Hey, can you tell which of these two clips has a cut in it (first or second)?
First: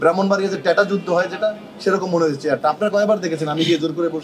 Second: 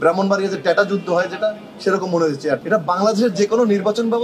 second